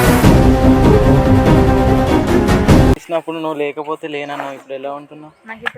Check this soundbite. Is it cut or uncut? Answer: cut